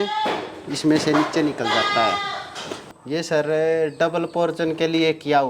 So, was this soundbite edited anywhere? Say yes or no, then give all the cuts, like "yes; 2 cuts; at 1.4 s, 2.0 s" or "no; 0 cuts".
yes; 1 cut; at 2.8 s